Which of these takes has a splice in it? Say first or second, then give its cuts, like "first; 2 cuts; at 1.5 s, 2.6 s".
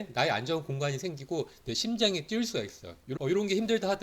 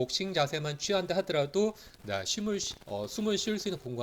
first; 1 cut; at 3.0 s